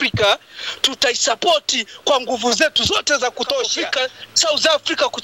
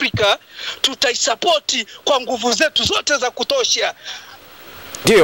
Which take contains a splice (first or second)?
first